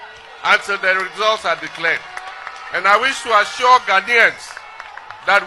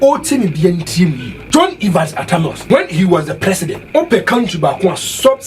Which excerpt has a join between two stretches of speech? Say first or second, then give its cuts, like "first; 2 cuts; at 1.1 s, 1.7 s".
second; 3 cuts; at 1.3 s, 2.6 s, 3.8 s